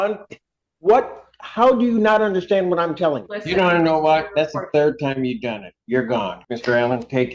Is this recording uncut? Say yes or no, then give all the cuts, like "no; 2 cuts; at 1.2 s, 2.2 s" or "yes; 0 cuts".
no; 2 cuts; at 3.3 s, 6.4 s